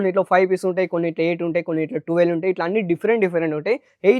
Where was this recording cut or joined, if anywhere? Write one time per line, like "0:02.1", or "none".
none